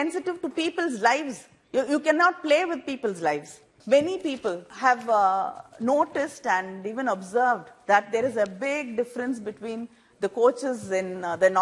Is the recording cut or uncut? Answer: cut